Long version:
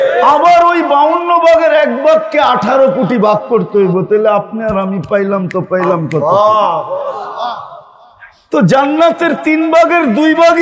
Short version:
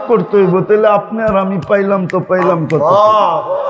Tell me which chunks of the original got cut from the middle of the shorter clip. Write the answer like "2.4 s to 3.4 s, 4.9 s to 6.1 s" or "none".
none